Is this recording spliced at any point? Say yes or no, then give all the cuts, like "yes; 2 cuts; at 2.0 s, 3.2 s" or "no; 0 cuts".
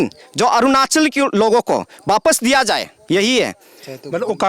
no; 0 cuts